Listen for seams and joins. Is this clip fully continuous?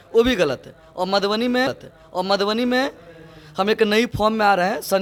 yes; 0 cuts

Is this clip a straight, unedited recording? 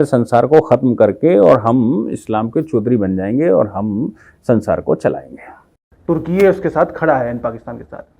no; 1 cut; at 5.9 s

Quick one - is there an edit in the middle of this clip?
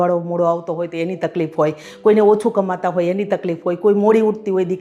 no; 0 cuts

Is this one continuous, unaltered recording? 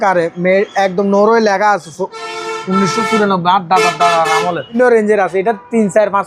no; 1 cut; at 4.8 s

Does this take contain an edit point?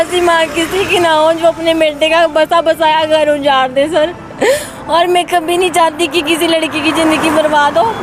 no; 0 cuts

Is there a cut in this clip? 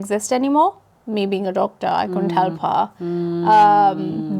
yes; 1 cut; at 0.9 s

